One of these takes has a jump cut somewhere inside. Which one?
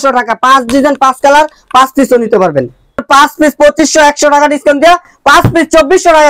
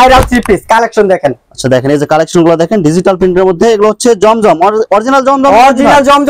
first; 1 cut; at 3.0 s

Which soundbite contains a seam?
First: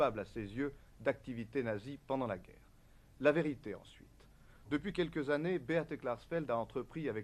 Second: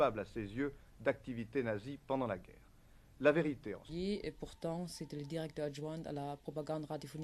first; 1 cut; at 3.8 s

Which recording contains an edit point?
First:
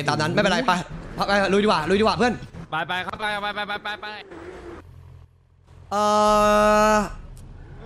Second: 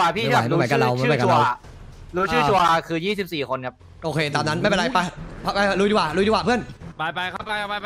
first; 1 cut; at 4.8 s

